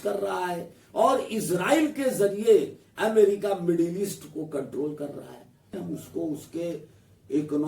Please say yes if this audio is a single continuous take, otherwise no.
no